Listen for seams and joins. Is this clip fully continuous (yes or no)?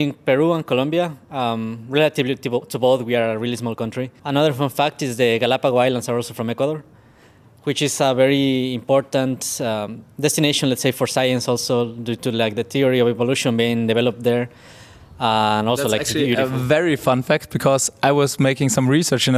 yes